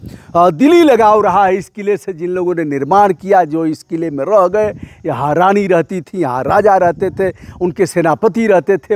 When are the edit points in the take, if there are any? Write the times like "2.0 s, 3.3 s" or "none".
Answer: none